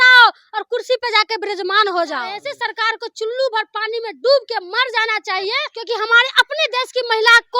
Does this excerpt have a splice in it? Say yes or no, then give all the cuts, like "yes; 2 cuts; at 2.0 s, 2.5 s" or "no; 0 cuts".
yes; 2 cuts; at 2.4 s, 5.7 s